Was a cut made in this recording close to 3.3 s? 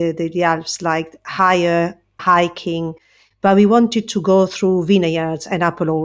no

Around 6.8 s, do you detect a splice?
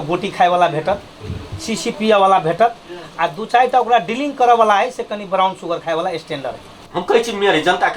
yes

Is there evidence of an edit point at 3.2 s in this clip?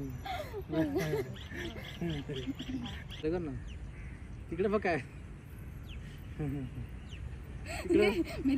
yes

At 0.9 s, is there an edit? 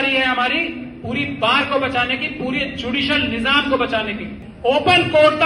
no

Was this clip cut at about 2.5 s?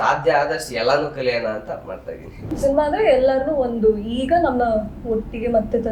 yes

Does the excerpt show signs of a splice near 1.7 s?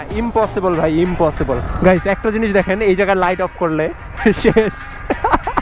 yes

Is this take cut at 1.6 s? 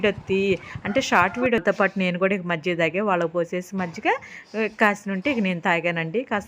yes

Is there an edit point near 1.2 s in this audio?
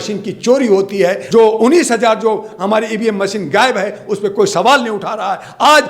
yes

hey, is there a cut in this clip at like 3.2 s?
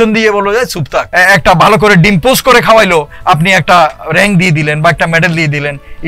no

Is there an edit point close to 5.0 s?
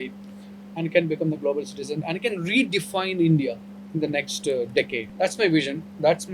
yes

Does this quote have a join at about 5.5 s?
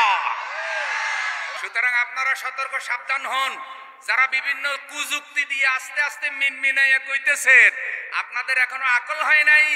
no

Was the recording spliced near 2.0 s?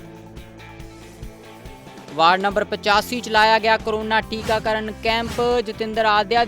no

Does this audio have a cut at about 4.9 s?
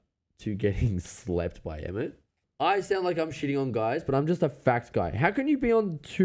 no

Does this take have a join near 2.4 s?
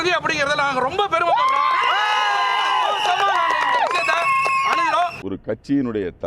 no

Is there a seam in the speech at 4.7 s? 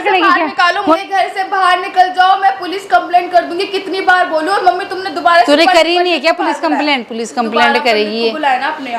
no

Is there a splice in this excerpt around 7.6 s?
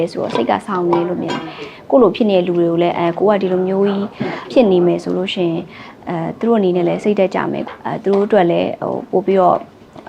yes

